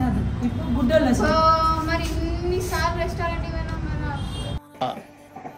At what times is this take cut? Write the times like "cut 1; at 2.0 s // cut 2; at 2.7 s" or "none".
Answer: none